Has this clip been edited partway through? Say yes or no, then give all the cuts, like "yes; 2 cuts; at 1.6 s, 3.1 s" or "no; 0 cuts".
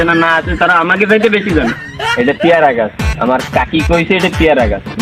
no; 0 cuts